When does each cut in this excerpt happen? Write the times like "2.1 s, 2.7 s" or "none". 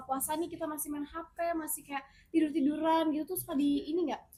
none

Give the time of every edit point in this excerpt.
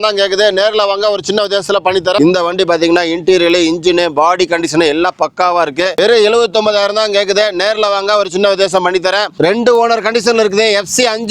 2.2 s, 9.3 s

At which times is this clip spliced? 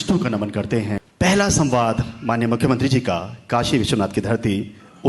1.0 s

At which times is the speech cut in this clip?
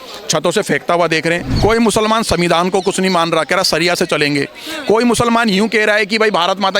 1.5 s

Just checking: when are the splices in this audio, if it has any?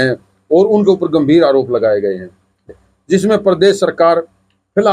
2.6 s

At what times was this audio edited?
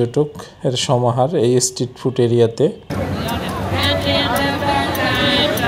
2.8 s

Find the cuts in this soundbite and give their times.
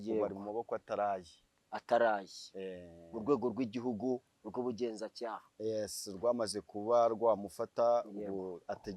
none

